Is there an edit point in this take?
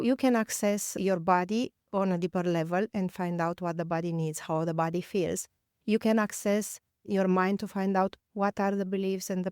yes; 1 cut; at 0.9 s

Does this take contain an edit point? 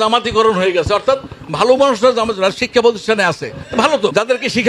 no; 0 cuts

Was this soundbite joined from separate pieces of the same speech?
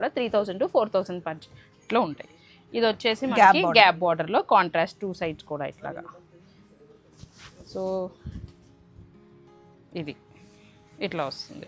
no; 0 cuts

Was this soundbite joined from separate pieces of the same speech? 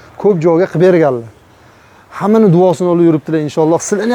no; 0 cuts

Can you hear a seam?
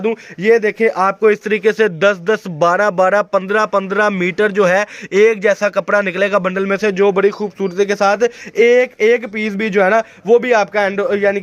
no; 0 cuts

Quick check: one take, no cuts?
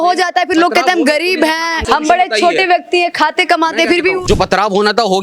no; 2 cuts; at 1.8 s, 4.2 s

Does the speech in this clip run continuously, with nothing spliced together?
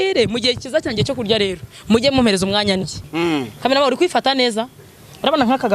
no; 1 cut; at 3.0 s

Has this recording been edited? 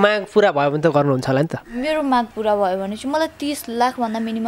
no; 0 cuts

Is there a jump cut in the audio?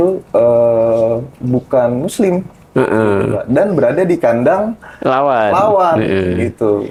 no; 0 cuts

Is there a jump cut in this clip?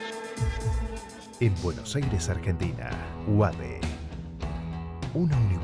yes; 1 cut; at 1.2 s

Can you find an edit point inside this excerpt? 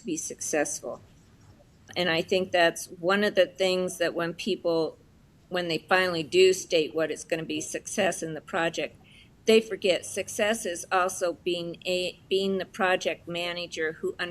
yes; 1 cut; at 1.9 s

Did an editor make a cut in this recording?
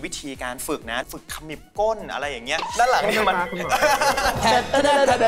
yes; 3 cuts; at 1.1 s, 2.7 s, 4.4 s

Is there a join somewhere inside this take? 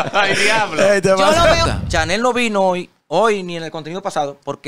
yes; 1 cut; at 1.7 s

